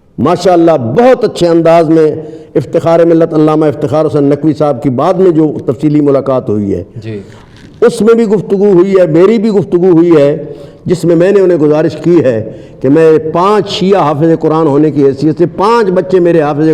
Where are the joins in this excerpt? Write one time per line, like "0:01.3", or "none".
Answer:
none